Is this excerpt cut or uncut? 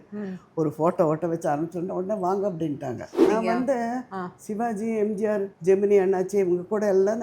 cut